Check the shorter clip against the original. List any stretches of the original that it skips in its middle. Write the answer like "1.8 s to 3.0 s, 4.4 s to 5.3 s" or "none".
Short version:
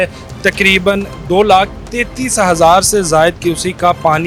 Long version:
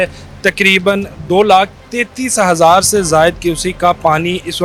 none